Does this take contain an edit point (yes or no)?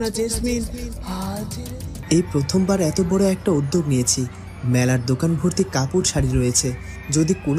yes